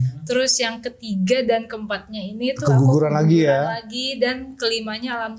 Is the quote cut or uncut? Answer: uncut